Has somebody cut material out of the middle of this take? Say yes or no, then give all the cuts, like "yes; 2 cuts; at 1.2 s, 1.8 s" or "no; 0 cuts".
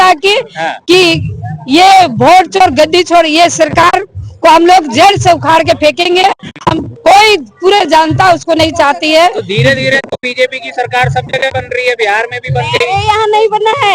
no; 0 cuts